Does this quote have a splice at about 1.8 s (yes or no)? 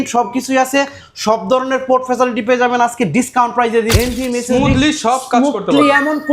no